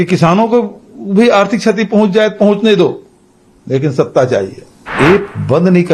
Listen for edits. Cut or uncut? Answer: cut